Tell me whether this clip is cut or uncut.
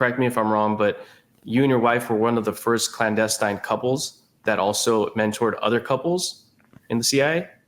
uncut